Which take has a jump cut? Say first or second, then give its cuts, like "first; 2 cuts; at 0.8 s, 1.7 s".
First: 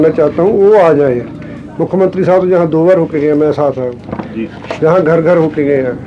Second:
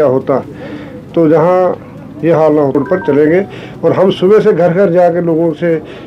second; 1 cut; at 2.8 s